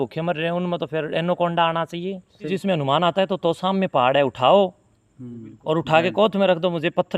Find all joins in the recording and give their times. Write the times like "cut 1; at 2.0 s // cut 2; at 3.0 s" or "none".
cut 1; at 2.5 s